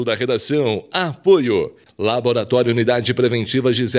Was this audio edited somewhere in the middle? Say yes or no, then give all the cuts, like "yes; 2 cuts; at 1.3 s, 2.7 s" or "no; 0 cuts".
yes; 1 cut; at 1.8 s